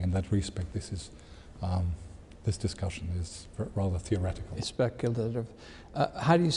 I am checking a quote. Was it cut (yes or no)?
no